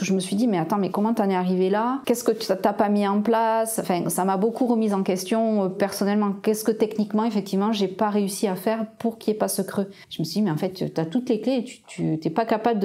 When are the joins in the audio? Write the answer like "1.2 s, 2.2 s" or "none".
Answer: 2.0 s, 10.0 s